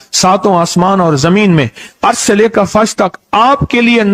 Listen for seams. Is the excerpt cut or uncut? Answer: uncut